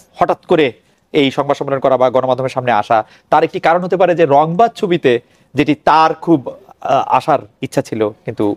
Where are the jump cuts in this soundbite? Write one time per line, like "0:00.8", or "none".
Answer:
none